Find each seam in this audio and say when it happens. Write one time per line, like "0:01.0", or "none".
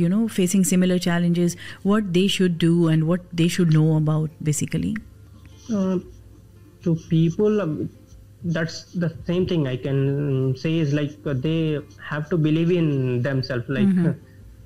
none